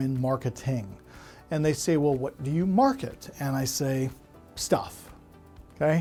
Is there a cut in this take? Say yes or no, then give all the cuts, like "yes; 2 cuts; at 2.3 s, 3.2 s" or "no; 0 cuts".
no; 0 cuts